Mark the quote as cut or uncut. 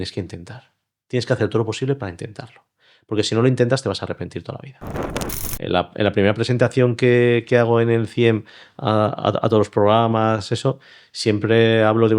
cut